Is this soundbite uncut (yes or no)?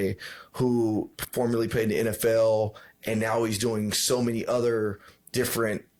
yes